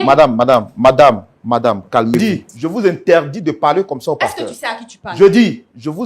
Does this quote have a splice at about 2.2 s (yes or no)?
yes